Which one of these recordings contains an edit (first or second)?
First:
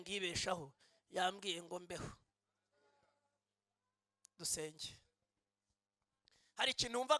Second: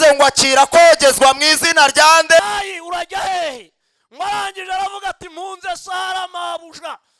second